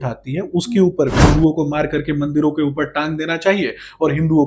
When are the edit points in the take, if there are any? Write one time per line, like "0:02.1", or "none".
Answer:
0:01.2

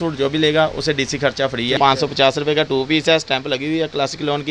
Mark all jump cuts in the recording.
0:01.8

